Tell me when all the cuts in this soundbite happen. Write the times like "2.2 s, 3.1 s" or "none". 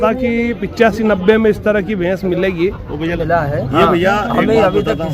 3.2 s